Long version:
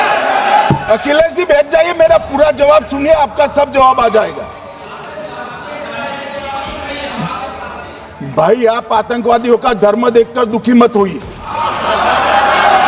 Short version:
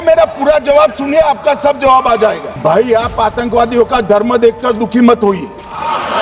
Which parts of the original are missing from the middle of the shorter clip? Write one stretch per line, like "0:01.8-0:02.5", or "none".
0:04.4-0:08.2